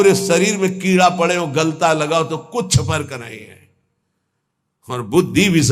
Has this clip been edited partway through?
no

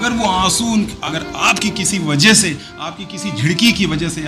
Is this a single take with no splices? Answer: no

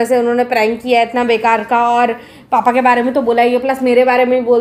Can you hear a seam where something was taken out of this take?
no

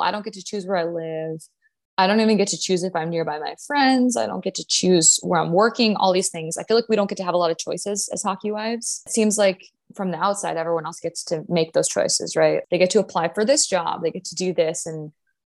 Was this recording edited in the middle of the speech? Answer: yes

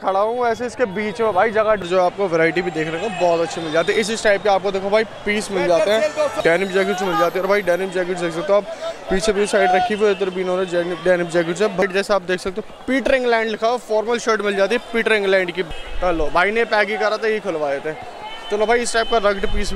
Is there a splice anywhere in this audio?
yes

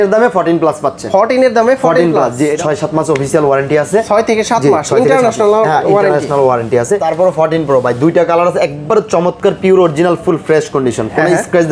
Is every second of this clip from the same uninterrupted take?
no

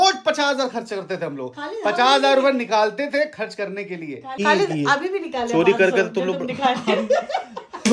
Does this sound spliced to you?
yes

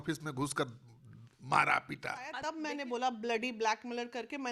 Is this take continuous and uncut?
no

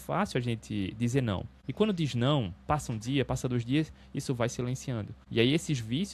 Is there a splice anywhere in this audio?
yes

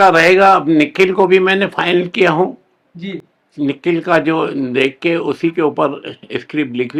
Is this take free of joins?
yes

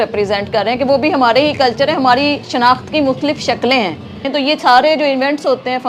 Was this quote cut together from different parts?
yes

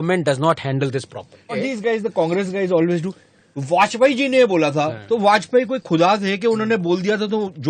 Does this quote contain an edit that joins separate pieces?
yes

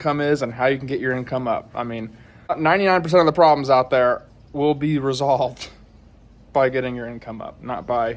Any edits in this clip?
yes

